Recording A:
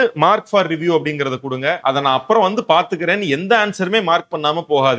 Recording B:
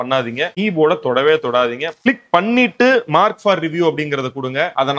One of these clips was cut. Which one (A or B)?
B